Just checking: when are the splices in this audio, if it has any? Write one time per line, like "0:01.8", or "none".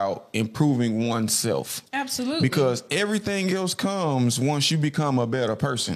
none